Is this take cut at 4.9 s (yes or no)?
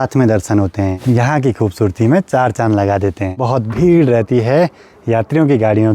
no